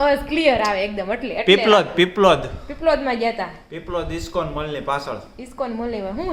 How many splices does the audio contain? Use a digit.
0